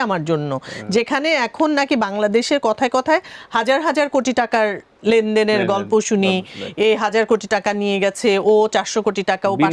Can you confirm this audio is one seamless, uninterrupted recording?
yes; 0 cuts

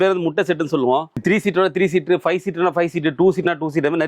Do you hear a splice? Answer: yes; 1 cut; at 1.2 s

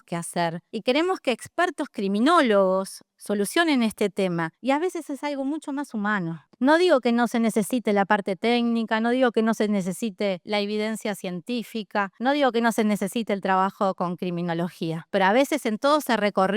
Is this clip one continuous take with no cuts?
no; 1 cut; at 4.5 s

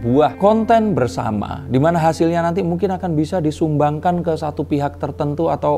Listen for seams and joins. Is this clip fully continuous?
yes; 0 cuts

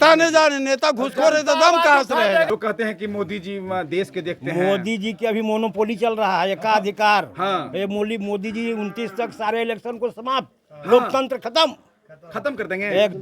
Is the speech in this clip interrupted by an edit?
yes; 1 cut; at 2.5 s

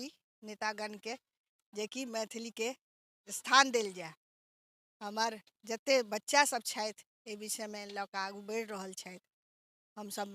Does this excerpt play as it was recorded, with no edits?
yes; 0 cuts

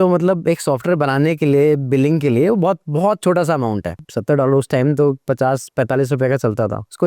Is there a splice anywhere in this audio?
yes; 1 cut; at 4.0 s

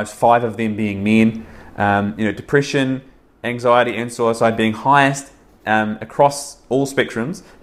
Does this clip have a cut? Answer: no; 0 cuts

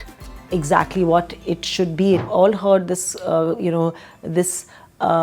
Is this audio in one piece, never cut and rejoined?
no; 1 cut; at 2.3 s

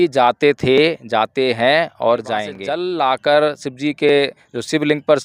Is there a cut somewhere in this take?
yes; 1 cut; at 2.6 s

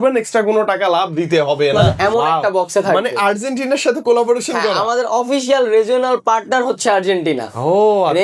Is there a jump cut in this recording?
yes; 1 cut; at 1.9 s

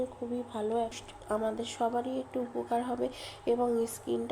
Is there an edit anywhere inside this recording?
yes; 1 cut; at 1.0 s

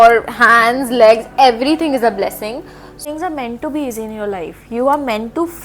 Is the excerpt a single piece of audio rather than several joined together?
no; 1 cut; at 3.0 s

